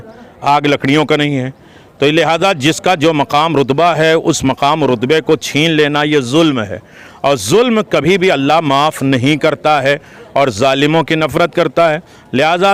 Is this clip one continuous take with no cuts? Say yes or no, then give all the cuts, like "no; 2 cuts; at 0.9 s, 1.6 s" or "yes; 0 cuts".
yes; 0 cuts